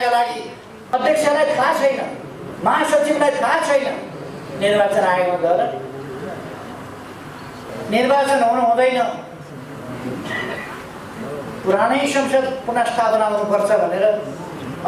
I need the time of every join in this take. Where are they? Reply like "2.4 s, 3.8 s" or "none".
0.9 s, 7.7 s